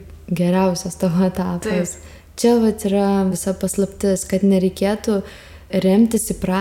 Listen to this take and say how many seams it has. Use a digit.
1